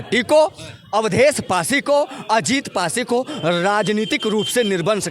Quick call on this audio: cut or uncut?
uncut